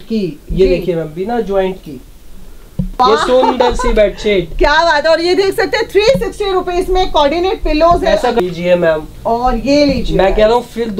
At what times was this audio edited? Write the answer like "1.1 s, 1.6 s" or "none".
2.8 s, 8.4 s